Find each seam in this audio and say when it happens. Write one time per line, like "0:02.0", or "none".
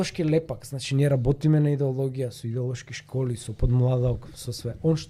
none